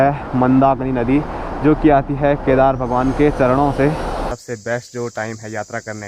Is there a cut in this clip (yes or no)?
yes